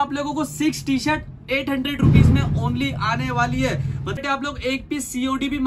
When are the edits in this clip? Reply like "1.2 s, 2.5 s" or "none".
4.2 s